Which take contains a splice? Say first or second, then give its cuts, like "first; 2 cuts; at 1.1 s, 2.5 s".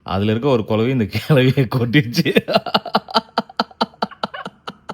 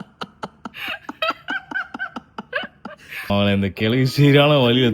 second; 1 cut; at 3.3 s